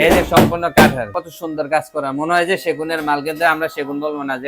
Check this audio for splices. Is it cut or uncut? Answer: cut